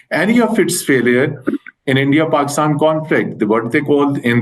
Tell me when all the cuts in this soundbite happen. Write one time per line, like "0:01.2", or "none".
none